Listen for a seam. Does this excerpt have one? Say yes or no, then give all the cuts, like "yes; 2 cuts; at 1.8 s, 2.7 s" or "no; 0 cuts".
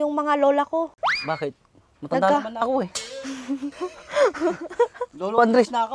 yes; 1 cut; at 1.2 s